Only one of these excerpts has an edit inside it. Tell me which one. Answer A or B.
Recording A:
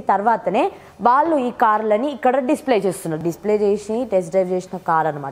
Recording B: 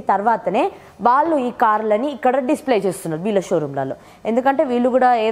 A